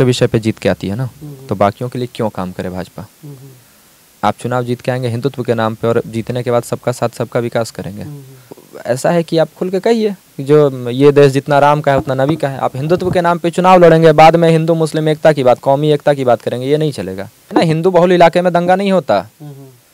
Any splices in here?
yes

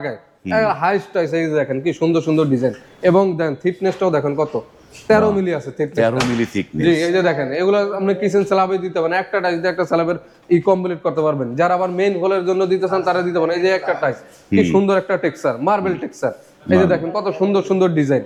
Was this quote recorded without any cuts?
yes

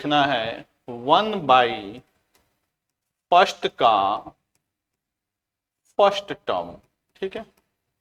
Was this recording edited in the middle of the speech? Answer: no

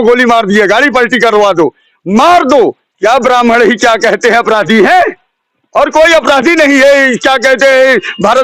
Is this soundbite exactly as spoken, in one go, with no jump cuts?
no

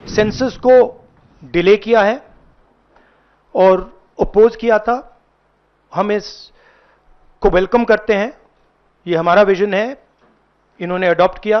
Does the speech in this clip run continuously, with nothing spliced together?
yes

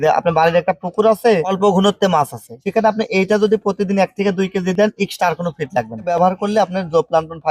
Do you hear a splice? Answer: yes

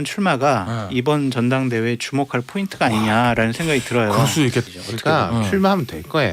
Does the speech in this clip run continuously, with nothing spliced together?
no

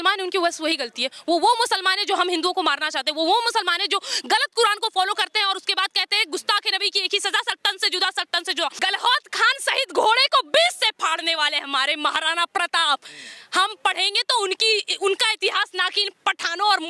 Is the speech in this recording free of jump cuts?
no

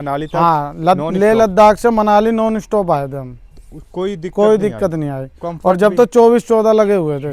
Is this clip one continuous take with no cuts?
yes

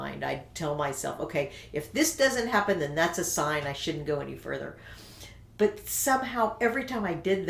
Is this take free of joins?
yes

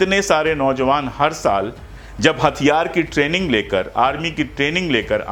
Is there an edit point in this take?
no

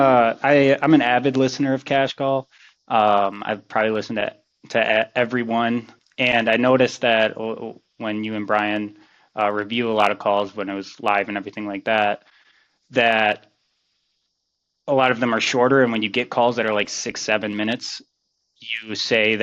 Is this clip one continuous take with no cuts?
no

